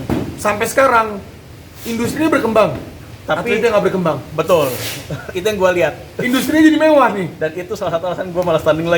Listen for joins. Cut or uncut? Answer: uncut